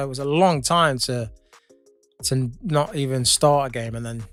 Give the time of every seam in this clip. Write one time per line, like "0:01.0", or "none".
none